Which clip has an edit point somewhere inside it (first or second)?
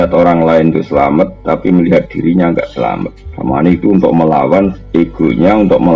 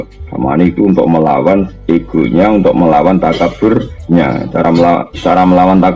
second